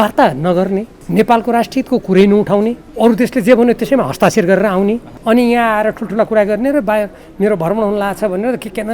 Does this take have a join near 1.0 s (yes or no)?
yes